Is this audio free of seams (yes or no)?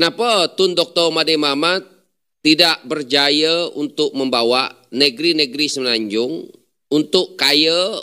yes